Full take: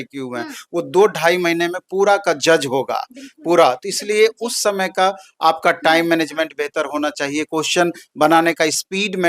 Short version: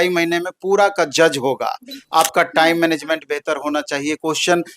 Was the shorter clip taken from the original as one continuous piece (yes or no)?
no